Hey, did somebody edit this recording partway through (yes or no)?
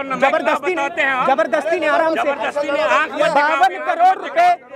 no